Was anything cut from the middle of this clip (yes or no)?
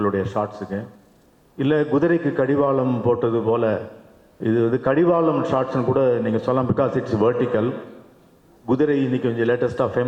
no